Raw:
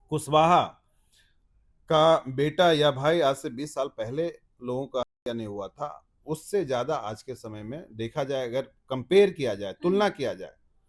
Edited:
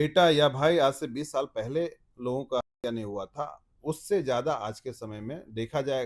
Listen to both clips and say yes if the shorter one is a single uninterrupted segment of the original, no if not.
yes